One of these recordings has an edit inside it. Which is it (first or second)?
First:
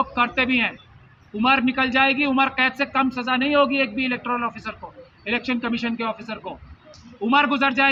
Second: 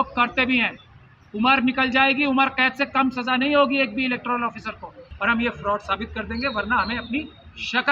second